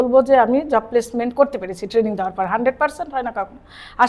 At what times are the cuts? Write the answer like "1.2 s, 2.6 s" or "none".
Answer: none